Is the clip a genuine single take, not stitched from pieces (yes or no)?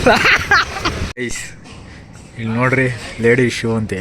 no